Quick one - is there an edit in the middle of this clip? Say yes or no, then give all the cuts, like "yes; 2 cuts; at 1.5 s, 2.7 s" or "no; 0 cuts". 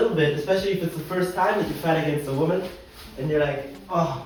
no; 0 cuts